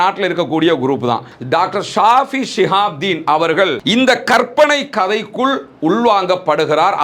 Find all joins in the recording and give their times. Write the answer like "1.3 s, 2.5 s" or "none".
1.3 s